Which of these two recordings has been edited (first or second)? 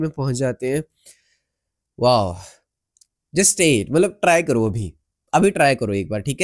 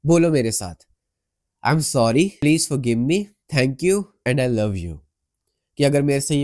second